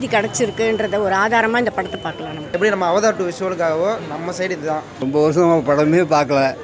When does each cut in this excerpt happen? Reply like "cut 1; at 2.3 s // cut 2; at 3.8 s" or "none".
cut 1; at 2.5 s // cut 2; at 5.0 s